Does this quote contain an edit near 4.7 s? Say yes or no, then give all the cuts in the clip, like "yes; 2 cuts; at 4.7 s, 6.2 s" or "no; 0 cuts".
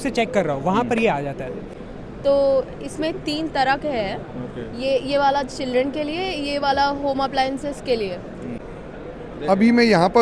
no; 2 cuts; at 1.7 s, 8.6 s